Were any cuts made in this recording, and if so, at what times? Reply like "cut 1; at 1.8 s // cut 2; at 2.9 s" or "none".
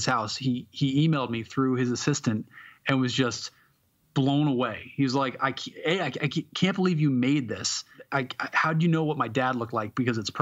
cut 1; at 8.0 s